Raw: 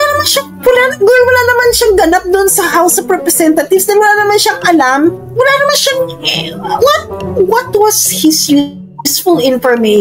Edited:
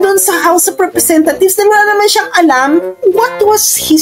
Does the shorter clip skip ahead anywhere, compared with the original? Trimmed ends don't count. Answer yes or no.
yes